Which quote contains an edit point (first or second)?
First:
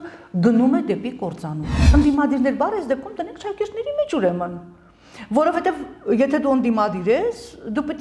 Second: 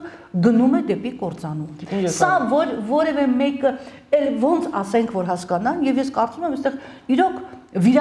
first